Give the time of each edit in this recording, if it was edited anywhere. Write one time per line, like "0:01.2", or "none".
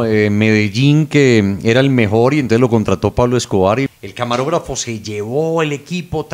0:03.9